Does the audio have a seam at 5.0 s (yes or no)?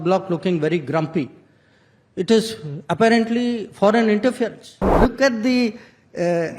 yes